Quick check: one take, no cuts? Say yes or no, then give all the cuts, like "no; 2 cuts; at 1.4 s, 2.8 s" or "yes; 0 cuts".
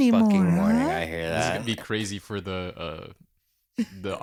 yes; 0 cuts